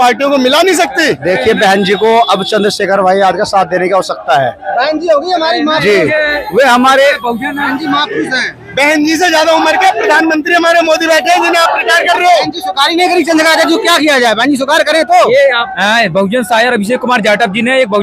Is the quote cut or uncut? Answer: cut